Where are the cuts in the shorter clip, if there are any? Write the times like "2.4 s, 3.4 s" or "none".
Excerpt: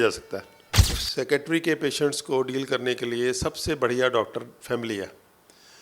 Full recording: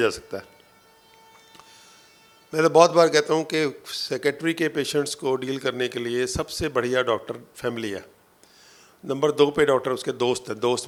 1.0 s